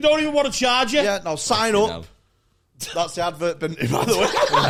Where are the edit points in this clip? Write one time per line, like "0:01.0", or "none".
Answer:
none